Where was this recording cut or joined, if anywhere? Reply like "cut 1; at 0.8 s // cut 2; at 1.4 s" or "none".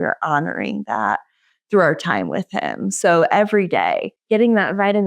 cut 1; at 4.1 s